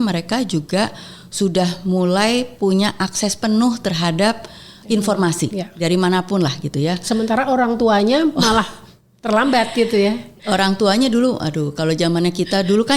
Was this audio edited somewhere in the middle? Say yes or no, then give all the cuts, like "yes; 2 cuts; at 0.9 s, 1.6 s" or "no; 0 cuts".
no; 0 cuts